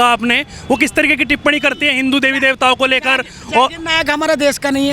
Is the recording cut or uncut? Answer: uncut